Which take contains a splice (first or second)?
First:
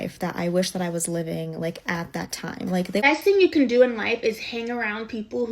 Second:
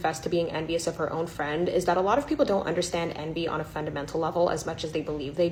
first